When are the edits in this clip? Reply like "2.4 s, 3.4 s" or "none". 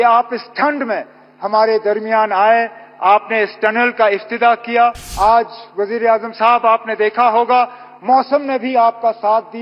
5.1 s

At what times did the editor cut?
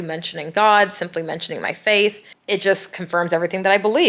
2.3 s

